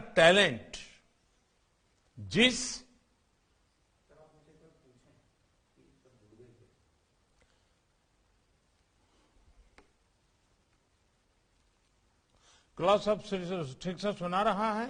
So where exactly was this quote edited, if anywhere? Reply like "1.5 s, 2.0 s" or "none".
none